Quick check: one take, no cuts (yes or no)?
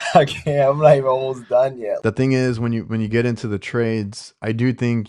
no